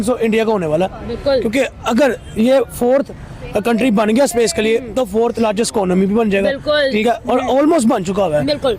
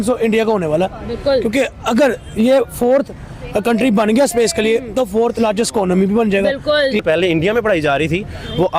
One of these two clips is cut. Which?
second; 1 cut; at 7.0 s

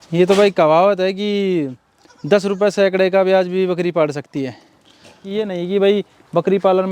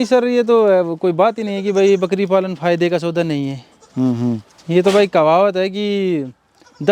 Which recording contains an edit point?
first; 1 cut; at 5.2 s

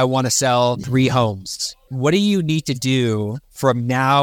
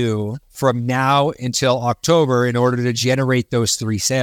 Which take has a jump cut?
first; 2 cuts; at 0.8 s, 1.9 s

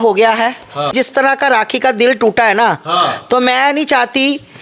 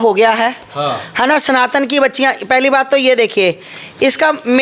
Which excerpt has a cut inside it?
first; 1 cut; at 0.9 s

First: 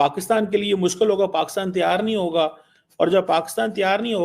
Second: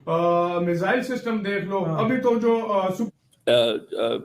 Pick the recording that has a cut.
second; 1 cut; at 3.0 s

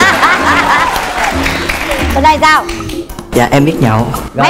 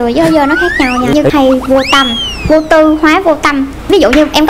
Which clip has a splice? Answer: second; 1 cut; at 1.3 s

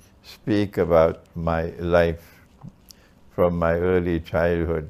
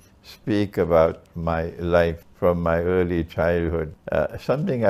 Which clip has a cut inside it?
second; 2 cuts; at 2.3 s, 4.0 s

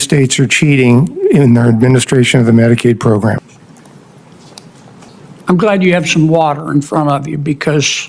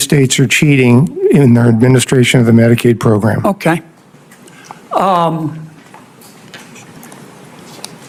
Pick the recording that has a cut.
first; 2 cuts; at 3.4 s, 5.1 s

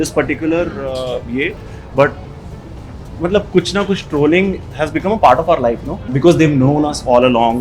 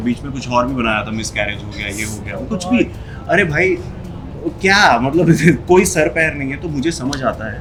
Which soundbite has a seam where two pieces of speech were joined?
first; 1 cut; at 6.1 s

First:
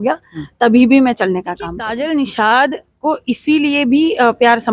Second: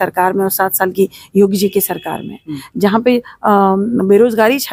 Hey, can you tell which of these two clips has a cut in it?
first; 1 cut; at 1.8 s

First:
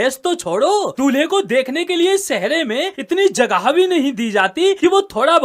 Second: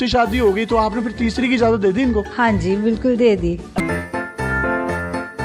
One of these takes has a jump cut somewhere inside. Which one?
second; 1 cut; at 3.8 s

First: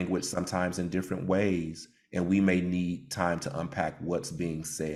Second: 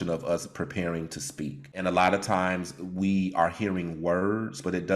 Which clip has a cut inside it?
second; 1 cut; at 1.7 s

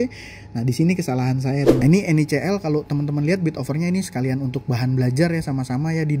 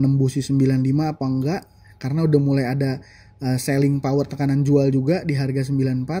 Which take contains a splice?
first; 1 cut; at 1.8 s

